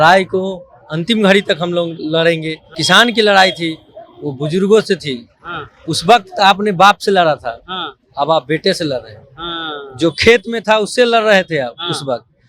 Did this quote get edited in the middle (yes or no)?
yes